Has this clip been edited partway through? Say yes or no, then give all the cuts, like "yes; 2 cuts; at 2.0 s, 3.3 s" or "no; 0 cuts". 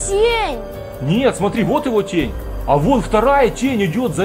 no; 0 cuts